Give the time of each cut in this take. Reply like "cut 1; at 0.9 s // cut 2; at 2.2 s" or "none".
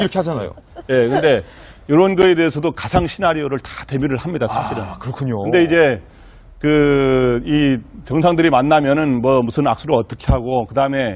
none